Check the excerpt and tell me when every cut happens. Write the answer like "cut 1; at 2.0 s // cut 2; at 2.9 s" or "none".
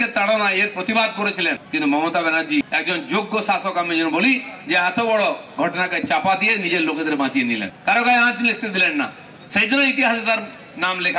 cut 1; at 1.6 s // cut 2; at 2.7 s // cut 3; at 7.7 s

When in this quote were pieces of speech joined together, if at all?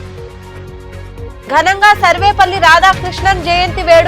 cut 1; at 1.0 s

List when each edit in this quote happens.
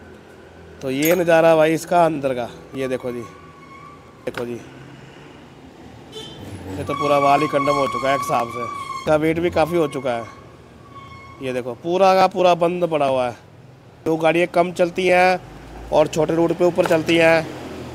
cut 1; at 4.3 s // cut 2; at 8.9 s // cut 3; at 14.0 s

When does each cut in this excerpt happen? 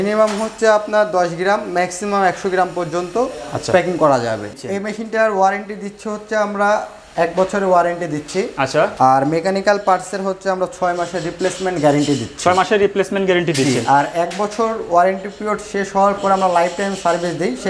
cut 1; at 4.5 s

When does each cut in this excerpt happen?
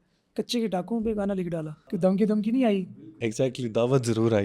cut 1; at 1.9 s // cut 2; at 3.1 s

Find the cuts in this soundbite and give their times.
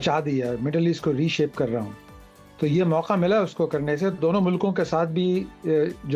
none

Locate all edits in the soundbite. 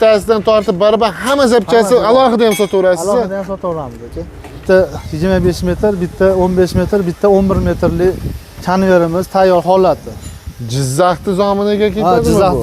cut 1; at 4.5 s

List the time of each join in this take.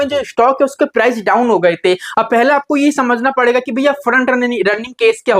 cut 1; at 2.0 s

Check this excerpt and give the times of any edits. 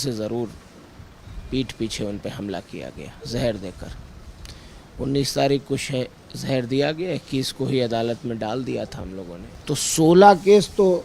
cut 1; at 9.5 s

